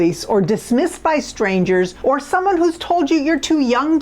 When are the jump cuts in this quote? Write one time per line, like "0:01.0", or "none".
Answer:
0:01.9